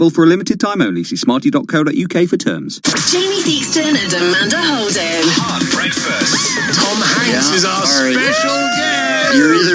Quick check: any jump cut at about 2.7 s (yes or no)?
yes